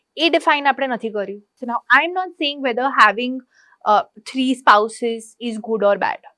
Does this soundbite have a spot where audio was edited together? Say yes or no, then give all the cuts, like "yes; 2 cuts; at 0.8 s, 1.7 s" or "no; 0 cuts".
yes; 1 cut; at 1.5 s